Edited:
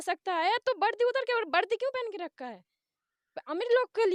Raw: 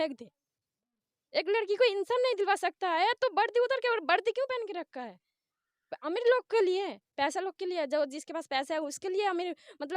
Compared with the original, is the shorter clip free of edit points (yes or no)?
yes